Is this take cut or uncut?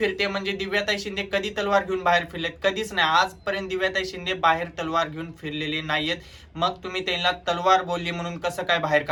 uncut